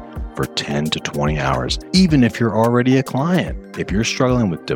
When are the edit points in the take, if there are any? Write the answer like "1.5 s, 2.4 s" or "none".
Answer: 1.8 s